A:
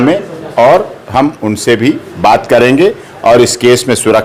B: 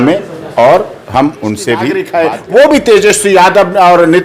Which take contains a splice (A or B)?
B